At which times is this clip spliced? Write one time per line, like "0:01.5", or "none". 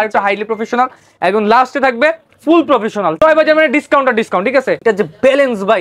0:03.2
0:04.8